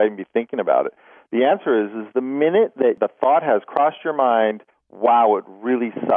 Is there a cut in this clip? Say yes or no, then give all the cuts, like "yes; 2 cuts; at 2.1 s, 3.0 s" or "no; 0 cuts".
yes; 1 cut; at 3.0 s